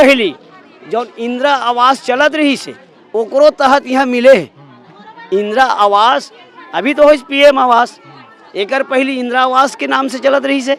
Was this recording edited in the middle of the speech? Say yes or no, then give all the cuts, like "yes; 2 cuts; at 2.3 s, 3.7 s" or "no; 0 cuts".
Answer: no; 0 cuts